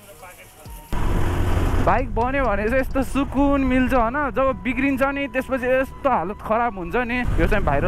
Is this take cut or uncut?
cut